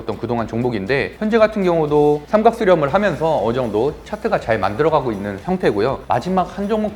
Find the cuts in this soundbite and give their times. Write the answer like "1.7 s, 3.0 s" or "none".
6.0 s